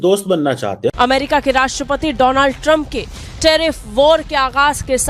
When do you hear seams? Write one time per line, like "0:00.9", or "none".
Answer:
0:00.9